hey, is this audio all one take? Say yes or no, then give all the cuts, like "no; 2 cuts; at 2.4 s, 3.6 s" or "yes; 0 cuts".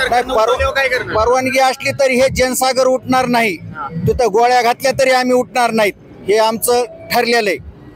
yes; 0 cuts